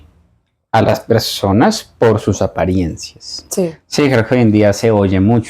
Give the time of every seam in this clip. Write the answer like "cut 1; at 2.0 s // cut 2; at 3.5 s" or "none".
cut 1; at 3.8 s